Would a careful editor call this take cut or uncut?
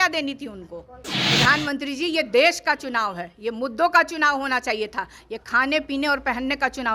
cut